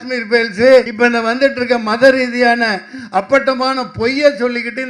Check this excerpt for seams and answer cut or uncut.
cut